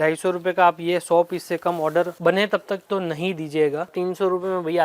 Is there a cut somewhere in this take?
yes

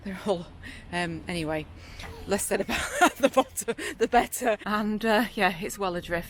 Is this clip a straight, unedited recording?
no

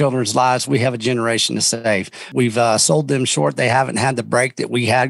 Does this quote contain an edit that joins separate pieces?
yes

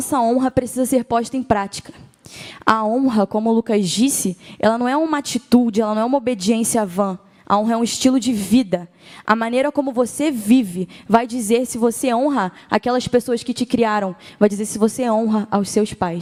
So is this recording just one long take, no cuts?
yes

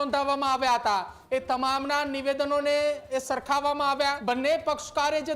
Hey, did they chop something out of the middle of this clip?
yes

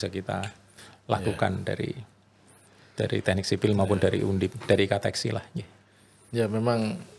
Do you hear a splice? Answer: no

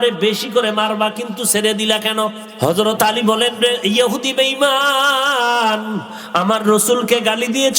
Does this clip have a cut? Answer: yes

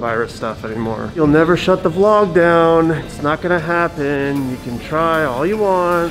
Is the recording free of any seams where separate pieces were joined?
no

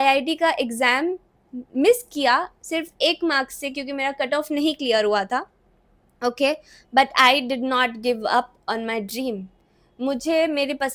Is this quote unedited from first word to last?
yes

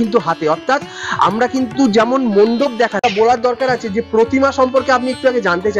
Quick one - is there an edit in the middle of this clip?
yes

